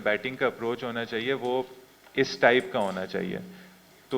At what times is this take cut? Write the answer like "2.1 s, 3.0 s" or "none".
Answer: none